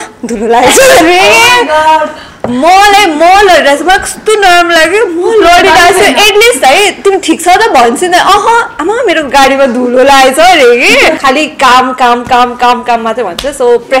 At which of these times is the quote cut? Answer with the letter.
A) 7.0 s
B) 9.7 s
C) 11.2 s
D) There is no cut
C